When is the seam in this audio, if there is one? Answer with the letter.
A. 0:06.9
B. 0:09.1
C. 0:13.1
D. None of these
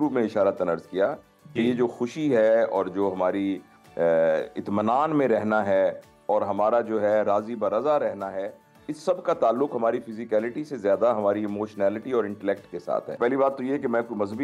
C